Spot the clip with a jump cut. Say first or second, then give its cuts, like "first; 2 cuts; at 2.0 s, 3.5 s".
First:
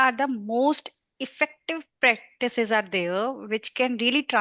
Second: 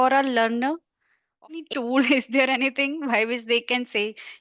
second; 1 cut; at 1.5 s